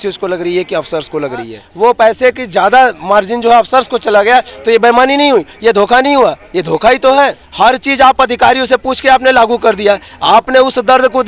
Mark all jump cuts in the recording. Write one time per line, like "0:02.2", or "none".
0:01.6
0:07.4